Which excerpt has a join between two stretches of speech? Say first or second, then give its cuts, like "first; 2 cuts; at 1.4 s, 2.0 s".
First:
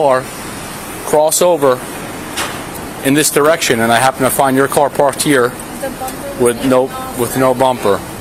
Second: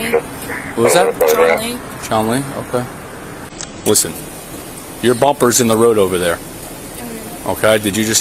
second; 1 cut; at 3.6 s